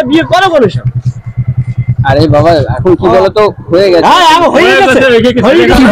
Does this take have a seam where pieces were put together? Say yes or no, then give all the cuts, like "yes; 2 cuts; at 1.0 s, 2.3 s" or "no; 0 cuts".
no; 0 cuts